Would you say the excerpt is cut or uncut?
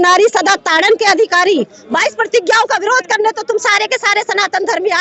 uncut